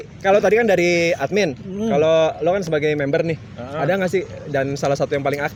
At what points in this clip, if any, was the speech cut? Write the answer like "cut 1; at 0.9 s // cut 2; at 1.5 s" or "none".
none